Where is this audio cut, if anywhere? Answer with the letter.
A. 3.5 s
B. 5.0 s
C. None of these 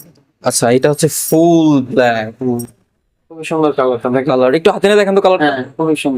A